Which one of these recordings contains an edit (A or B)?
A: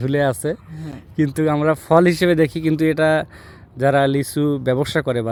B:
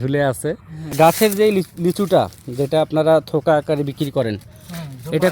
B